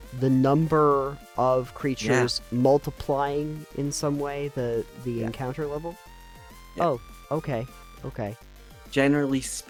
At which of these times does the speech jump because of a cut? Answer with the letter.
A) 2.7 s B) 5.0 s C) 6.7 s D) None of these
D